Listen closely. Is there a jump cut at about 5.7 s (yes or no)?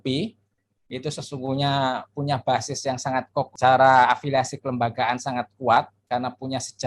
no